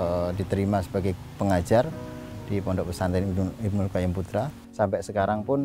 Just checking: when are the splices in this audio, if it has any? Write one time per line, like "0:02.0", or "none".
0:04.6